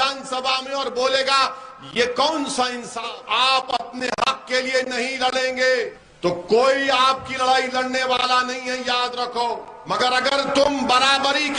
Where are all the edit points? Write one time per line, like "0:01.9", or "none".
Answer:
0:03.1
0:06.0
0:09.8

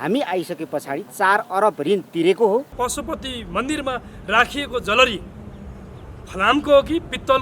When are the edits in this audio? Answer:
0:02.7

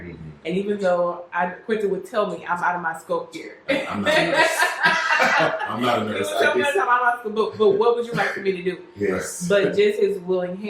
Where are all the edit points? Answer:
none

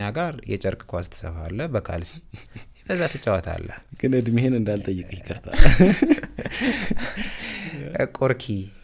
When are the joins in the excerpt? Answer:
none

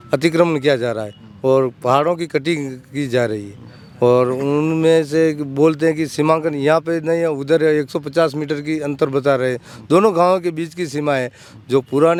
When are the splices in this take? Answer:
none

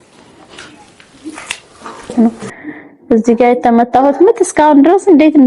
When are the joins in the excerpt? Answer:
0:02.1

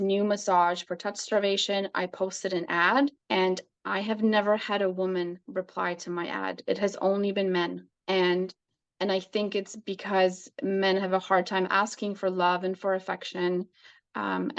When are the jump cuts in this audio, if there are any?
0:03.2
0:07.9

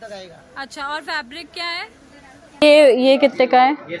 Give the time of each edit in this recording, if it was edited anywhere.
0:02.6

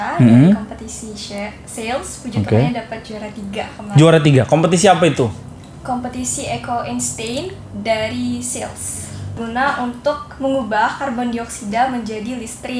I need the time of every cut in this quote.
0:09.4

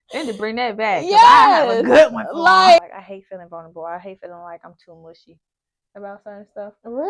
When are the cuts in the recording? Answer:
0:02.9

